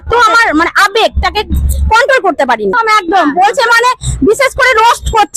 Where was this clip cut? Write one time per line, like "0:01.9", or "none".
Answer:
0:02.8